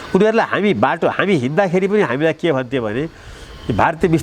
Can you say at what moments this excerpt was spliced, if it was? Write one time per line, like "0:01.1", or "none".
none